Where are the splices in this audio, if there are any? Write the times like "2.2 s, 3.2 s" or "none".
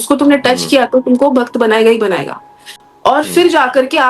2.7 s